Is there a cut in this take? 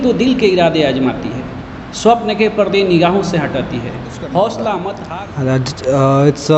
yes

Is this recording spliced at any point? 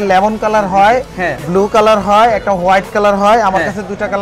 no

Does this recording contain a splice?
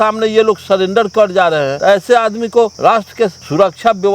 yes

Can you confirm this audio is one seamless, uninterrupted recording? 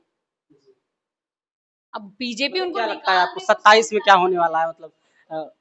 yes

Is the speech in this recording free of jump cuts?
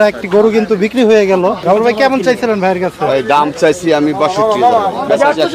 no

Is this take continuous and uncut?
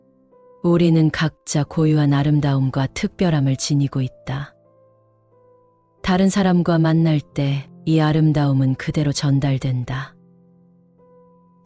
no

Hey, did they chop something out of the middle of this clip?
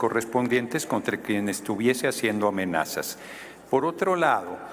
no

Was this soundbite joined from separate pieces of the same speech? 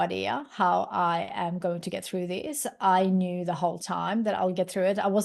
no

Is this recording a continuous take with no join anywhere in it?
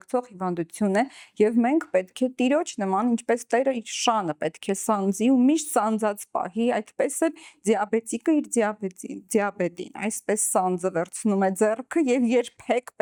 yes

